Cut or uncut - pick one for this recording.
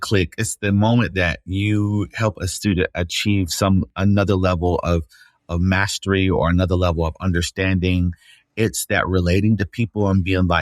uncut